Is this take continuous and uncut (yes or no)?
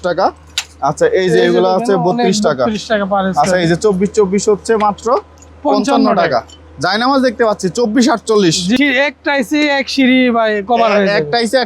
no